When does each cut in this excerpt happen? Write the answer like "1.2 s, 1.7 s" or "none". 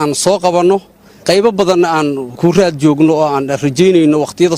1.2 s, 2.3 s

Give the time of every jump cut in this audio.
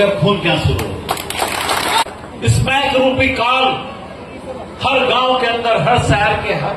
2.0 s

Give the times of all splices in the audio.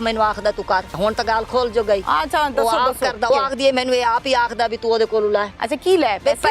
1.0 s, 3.3 s, 5.6 s

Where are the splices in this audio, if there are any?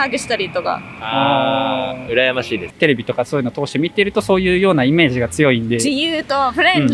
2.6 s

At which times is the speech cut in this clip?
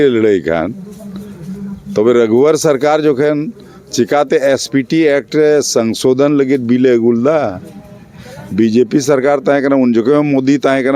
none

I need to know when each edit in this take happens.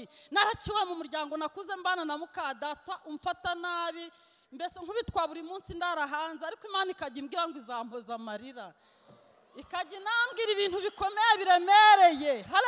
none

